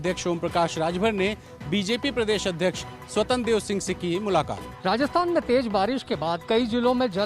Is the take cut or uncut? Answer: cut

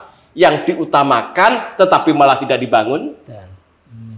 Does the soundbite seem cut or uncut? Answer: uncut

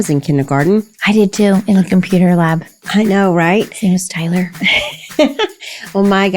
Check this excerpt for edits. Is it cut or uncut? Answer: cut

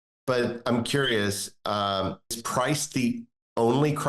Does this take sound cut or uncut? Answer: cut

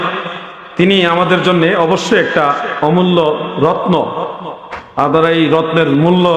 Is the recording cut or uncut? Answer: uncut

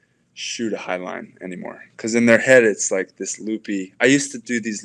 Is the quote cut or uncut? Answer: uncut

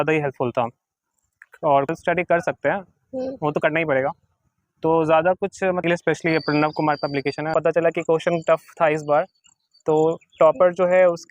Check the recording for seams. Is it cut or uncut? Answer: cut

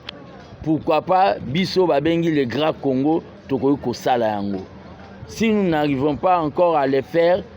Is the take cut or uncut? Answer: uncut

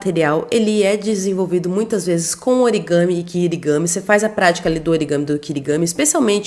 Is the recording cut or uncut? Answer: uncut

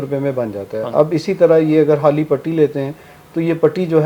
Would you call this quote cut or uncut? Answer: uncut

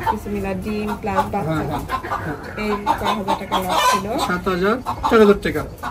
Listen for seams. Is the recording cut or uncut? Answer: uncut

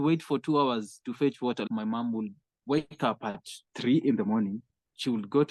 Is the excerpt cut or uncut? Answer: cut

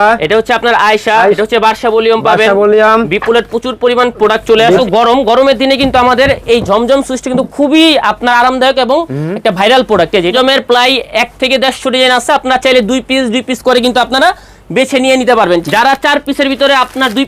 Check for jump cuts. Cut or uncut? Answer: cut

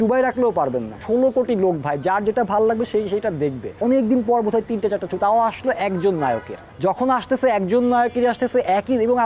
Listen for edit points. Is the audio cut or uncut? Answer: cut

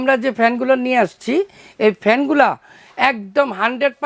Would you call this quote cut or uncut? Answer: uncut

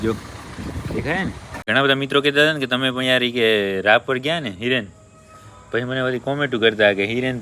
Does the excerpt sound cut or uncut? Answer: cut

